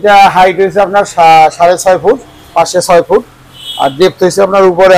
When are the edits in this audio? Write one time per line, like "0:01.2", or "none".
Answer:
none